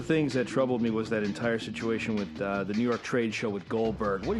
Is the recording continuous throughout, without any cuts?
yes; 0 cuts

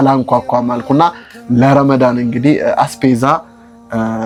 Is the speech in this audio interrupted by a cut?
no; 0 cuts

